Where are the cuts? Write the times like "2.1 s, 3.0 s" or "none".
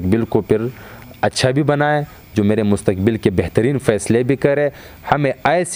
none